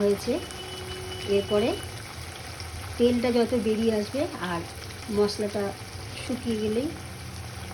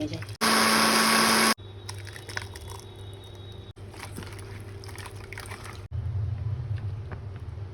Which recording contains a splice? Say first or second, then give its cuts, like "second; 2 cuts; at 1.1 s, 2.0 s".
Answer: second; 1 cut; at 1.8 s